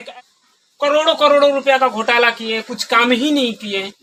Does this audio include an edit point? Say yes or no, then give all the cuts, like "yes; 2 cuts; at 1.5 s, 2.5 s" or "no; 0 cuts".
no; 0 cuts